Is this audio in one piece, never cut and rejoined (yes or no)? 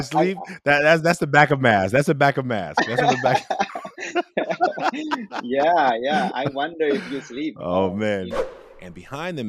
no